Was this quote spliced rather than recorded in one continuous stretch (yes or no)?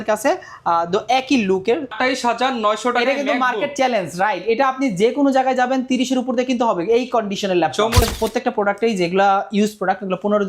yes